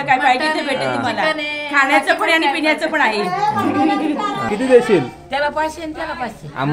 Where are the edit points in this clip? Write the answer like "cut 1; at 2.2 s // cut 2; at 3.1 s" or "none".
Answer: cut 1; at 4.4 s